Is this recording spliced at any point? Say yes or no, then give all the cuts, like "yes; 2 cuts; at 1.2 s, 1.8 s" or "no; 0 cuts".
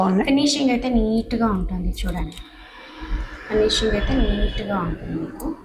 no; 0 cuts